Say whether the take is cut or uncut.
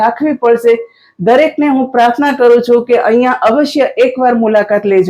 uncut